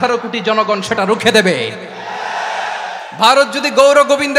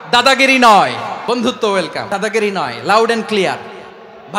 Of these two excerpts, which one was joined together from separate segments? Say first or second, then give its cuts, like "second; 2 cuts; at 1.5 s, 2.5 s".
second; 2 cuts; at 1.2 s, 2.0 s